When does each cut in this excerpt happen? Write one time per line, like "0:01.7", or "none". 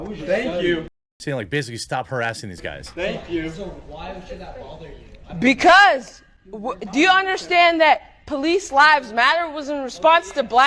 none